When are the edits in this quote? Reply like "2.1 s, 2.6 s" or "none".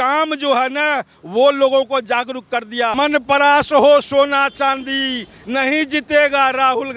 2.9 s